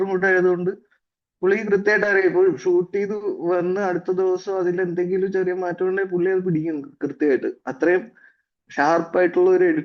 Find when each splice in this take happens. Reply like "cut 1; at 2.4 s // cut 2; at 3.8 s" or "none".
none